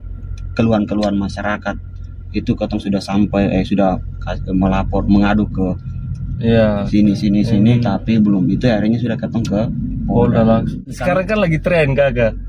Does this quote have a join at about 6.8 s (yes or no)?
no